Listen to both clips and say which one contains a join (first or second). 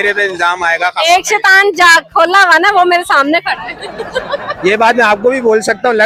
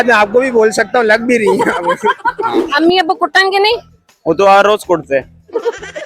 second